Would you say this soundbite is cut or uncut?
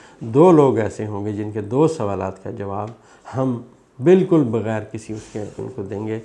uncut